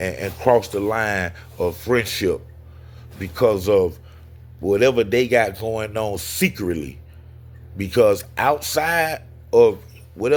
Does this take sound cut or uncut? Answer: uncut